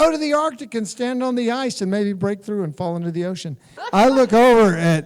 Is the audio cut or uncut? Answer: cut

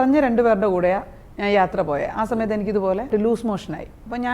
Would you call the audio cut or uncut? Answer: cut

